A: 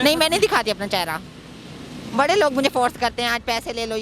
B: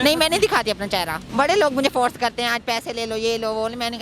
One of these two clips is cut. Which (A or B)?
B